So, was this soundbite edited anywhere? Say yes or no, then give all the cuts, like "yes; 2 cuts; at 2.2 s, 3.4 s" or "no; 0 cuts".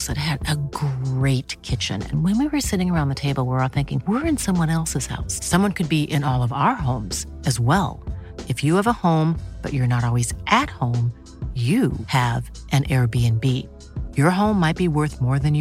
no; 0 cuts